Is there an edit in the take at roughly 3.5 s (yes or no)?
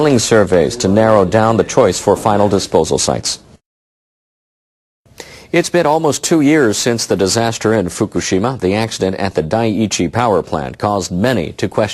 no